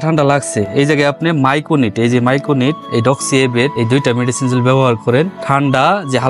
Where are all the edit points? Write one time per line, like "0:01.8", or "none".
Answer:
0:02.8
0:03.7
0:05.4